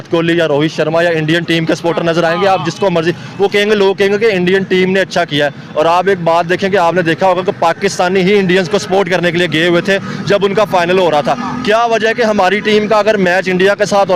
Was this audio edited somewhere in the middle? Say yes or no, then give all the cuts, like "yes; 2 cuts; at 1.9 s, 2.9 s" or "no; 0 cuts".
no; 0 cuts